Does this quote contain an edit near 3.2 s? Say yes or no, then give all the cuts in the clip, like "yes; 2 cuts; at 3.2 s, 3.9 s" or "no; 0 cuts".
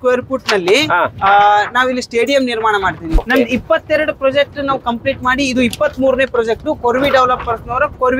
yes; 1 cut; at 3.2 s